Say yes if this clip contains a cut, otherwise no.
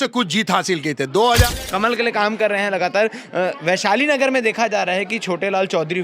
yes